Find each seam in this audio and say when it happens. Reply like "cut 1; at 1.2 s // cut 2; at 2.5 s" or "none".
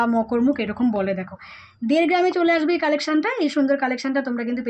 none